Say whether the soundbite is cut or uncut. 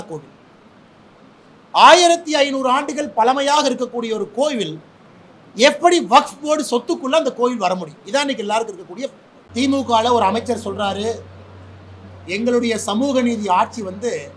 cut